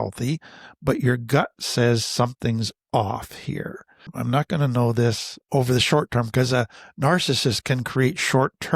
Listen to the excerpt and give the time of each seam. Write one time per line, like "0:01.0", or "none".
0:04.1
0:05.3